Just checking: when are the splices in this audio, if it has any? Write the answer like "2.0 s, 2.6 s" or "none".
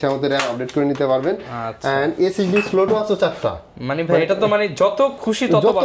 none